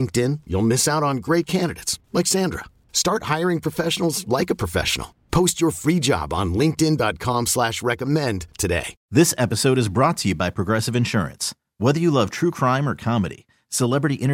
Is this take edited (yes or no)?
yes